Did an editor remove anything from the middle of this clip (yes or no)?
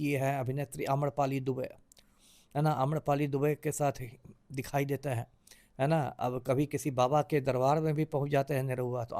no